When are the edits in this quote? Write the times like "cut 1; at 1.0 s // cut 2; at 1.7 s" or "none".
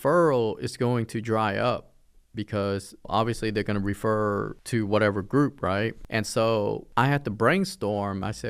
cut 1; at 3.1 s // cut 2; at 4.6 s // cut 3; at 6.0 s // cut 4; at 6.8 s